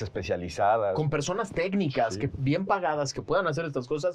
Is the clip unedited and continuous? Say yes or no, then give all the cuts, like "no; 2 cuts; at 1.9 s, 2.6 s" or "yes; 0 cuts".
yes; 0 cuts